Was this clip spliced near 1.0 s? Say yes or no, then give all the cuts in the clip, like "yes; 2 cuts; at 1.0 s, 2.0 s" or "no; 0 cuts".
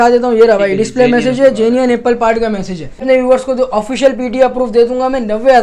no; 1 cut; at 3.0 s